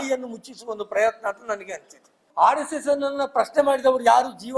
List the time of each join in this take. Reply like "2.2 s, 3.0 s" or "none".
2.2 s